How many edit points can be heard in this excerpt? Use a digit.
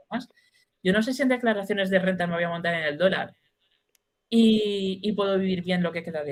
0